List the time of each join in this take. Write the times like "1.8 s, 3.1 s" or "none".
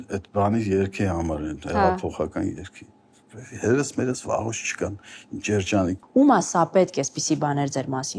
6.0 s